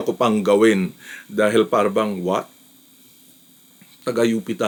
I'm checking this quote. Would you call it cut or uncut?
uncut